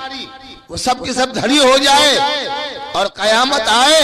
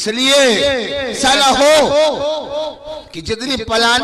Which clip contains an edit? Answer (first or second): second